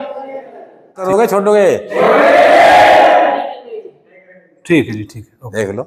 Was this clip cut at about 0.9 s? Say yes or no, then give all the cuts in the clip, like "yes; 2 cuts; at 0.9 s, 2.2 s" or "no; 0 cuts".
no; 0 cuts